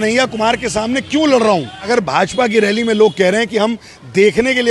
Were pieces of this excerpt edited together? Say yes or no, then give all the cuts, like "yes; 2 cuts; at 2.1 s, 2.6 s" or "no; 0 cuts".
yes; 1 cut; at 1.8 s